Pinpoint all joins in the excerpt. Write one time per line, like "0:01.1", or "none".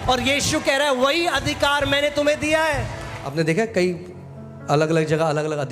0:03.1